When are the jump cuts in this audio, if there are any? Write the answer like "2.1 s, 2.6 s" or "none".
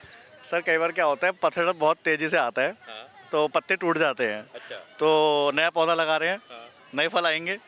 none